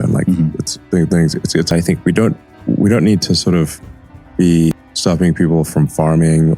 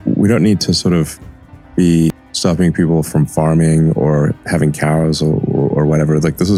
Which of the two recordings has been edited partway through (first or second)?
first